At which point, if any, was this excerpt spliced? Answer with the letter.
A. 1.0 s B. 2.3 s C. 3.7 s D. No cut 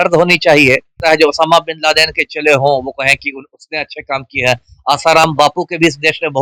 A